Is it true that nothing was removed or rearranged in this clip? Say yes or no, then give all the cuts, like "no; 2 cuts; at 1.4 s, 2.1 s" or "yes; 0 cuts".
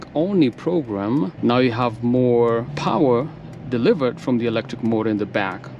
no; 2 cuts; at 1.3 s, 2.7 s